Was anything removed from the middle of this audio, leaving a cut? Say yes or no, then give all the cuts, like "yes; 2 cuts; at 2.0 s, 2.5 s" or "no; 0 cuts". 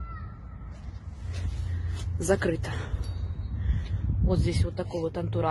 no; 0 cuts